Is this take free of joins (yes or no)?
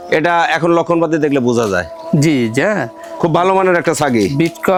yes